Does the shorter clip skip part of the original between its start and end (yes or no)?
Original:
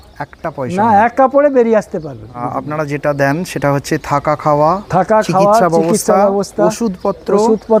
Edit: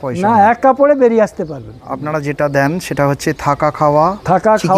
yes